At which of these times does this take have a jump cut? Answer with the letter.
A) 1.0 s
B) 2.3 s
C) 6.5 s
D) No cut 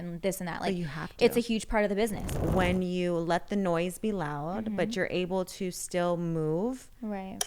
B